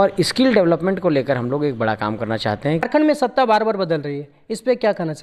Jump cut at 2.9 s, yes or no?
yes